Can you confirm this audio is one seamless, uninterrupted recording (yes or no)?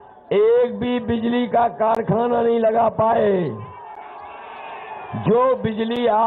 yes